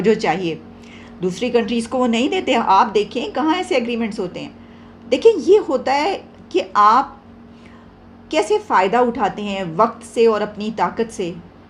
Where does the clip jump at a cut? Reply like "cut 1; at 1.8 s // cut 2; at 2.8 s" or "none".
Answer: none